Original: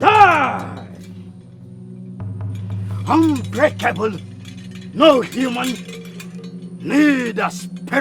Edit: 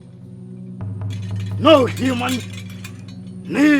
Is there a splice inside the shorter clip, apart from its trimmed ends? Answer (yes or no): yes